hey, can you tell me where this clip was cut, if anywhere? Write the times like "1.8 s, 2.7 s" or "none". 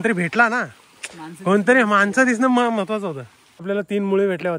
3.6 s